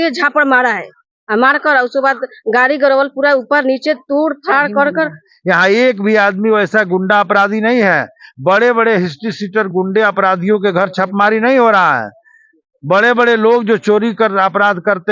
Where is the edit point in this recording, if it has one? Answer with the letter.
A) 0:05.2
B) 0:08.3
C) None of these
A